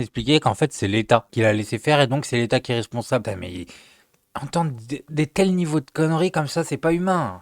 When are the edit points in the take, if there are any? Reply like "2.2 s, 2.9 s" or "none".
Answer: 1.3 s